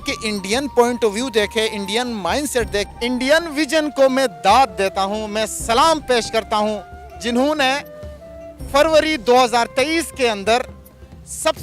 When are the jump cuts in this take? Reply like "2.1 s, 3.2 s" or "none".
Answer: 2.9 s